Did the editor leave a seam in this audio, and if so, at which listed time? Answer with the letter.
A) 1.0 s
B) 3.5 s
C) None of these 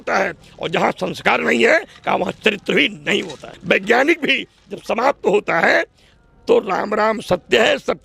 B